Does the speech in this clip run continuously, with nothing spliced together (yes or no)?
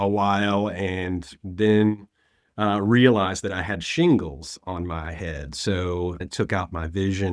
no